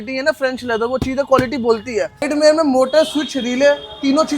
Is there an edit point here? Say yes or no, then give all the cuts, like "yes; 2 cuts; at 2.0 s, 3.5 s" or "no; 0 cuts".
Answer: yes; 1 cut; at 2.3 s